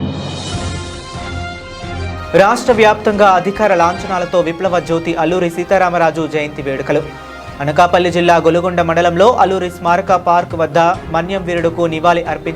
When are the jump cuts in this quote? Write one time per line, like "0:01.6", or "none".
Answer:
0:02.1